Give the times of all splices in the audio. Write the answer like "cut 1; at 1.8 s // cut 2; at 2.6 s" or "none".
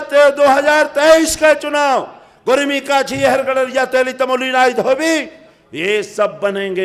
none